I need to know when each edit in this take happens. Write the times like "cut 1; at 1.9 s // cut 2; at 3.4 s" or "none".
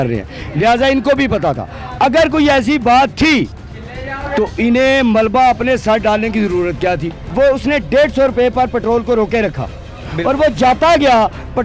cut 1; at 7.2 s